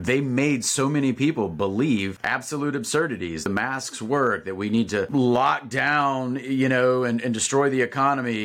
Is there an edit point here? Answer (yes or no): yes